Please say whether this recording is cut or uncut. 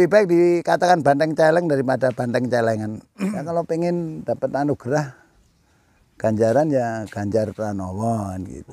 cut